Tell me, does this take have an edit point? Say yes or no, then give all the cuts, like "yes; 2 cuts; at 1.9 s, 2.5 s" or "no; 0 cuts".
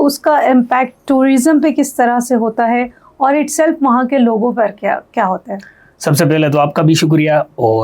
no; 0 cuts